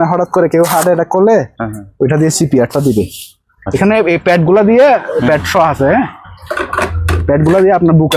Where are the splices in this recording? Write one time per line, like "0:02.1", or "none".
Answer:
none